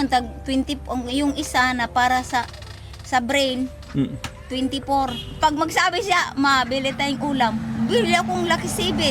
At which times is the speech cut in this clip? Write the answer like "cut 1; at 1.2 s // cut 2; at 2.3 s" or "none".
cut 1; at 5.2 s